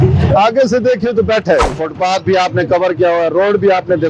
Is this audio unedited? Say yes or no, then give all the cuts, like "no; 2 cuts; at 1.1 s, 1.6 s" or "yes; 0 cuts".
no; 1 cut; at 1.7 s